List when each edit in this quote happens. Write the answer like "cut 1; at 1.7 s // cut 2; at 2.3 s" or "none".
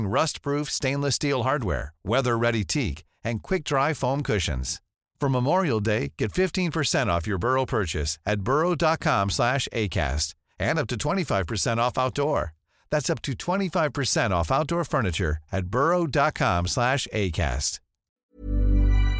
cut 1; at 18.3 s